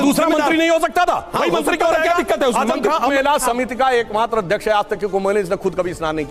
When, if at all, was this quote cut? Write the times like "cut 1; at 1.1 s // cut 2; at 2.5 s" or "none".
cut 1; at 3.1 s